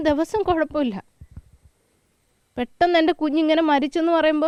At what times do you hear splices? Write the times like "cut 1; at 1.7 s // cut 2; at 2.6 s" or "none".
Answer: none